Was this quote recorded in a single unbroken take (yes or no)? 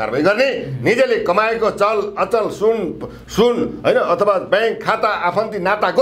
yes